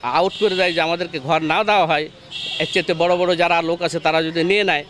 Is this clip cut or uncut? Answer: uncut